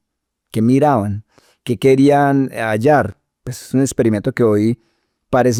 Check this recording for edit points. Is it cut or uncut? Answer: uncut